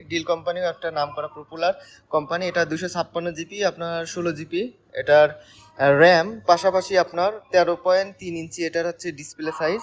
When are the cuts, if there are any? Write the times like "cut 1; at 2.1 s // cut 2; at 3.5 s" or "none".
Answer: none